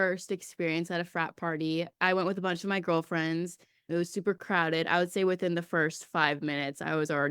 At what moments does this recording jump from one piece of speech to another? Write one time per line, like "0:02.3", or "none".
0:03.8